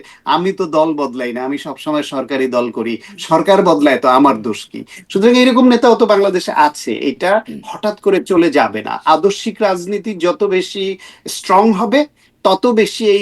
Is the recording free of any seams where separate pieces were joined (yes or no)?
yes